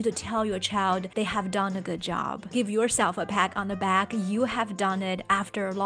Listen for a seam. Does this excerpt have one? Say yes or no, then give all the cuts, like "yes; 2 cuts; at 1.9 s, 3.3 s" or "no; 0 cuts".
yes; 2 cuts; at 1.1 s, 2.5 s